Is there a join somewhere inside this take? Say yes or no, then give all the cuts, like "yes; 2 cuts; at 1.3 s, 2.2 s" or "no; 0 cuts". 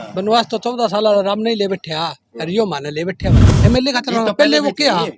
yes; 1 cut; at 3.5 s